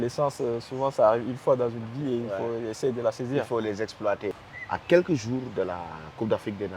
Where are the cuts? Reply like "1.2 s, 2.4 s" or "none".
4.4 s

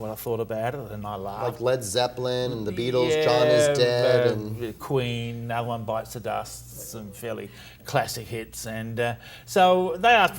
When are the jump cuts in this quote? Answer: 1.1 s

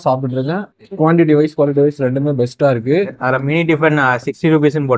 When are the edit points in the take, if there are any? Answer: 3.2 s

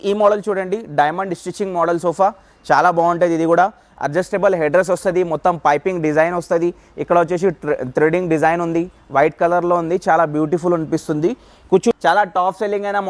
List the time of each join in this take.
11.9 s

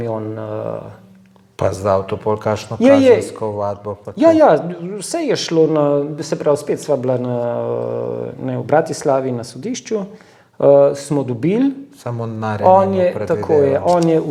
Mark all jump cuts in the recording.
none

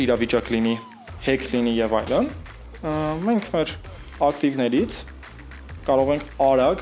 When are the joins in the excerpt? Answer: none

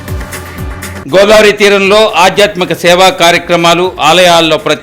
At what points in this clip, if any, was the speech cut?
1.0 s

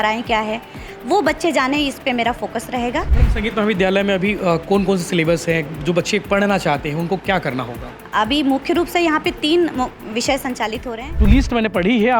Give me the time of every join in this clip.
3.2 s, 11.1 s

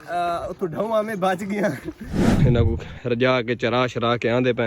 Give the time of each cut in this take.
2.4 s

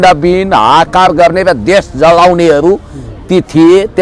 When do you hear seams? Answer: none

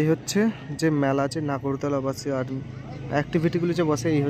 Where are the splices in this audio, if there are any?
none

